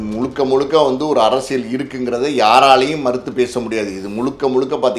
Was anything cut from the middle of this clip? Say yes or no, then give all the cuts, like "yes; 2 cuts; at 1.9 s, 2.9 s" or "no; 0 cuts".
no; 0 cuts